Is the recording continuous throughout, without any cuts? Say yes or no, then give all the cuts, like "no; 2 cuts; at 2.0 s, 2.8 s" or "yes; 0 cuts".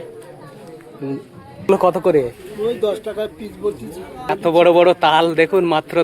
no; 2 cuts; at 1.7 s, 4.3 s